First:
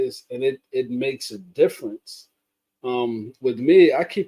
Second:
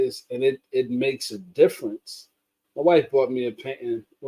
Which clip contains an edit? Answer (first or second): second